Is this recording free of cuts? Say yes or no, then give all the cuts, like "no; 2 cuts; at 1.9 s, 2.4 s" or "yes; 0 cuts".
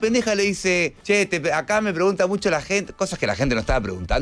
no; 1 cut; at 1.0 s